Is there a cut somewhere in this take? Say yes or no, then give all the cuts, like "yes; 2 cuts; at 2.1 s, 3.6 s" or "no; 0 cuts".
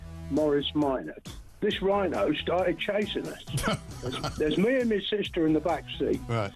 yes; 1 cut; at 3.8 s